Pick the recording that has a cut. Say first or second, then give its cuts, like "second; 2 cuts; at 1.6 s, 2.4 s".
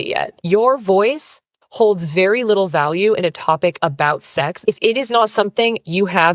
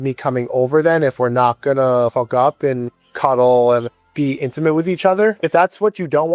second; 4 cuts; at 2.1 s, 2.9 s, 3.9 s, 5.4 s